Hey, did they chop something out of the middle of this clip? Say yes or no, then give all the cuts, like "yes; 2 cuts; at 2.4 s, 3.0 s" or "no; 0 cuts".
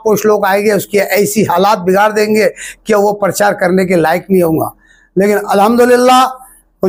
no; 0 cuts